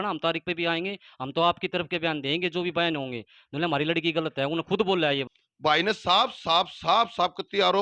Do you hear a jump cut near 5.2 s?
yes; 1 cut; at 5.2 s

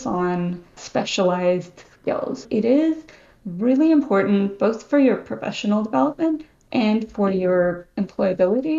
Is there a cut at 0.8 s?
yes; 2 cuts; at 0.8 s, 2.4 s

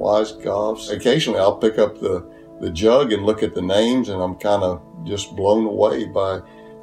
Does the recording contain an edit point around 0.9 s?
yes; 1 cut; at 0.9 s

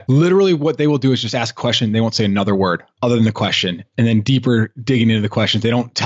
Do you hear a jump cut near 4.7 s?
no; 0 cuts

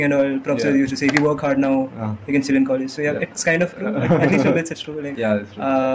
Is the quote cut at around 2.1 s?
no; 0 cuts

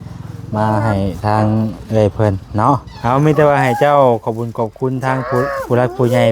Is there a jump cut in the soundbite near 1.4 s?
no; 1 cut; at 2.9 s

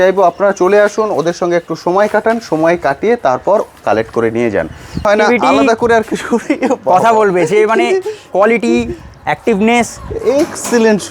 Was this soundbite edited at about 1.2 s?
no; 1 cut; at 5.0 s

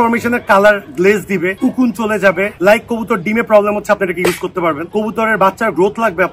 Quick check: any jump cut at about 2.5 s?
yes; 1 cut; at 2.5 s

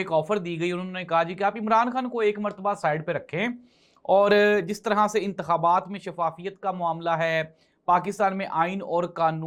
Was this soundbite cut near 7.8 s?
no; 0 cuts

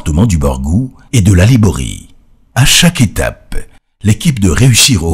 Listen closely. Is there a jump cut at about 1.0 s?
no; 1 cut; at 3.4 s

